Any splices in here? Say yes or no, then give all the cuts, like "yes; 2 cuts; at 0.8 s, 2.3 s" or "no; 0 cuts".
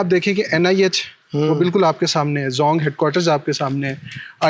no; 0 cuts